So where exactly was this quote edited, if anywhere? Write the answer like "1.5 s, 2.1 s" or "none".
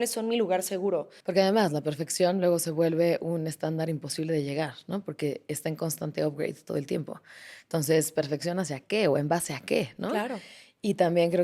1.2 s